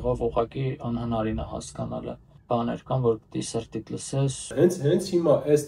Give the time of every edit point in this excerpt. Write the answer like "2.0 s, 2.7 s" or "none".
2.3 s, 4.5 s